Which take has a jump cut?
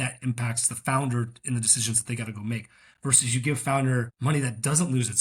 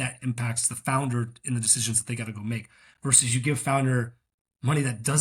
first; 1 cut; at 4.1 s

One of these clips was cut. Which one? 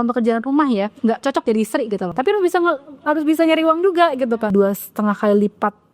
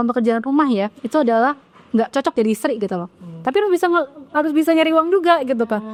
first; 3 cuts; at 0.9 s, 2.1 s, 4.5 s

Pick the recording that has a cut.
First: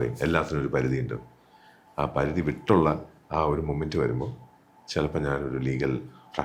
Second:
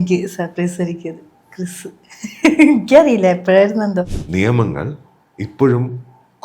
second; 1 cut; at 4.1 s

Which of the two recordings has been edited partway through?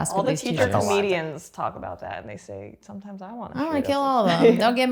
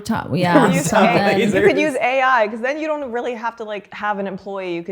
second; 1 cut; at 3.9 s

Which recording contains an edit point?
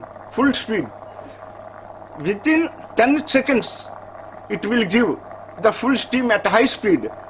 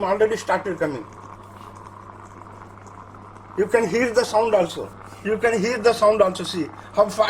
second; 1 cut; at 4.9 s

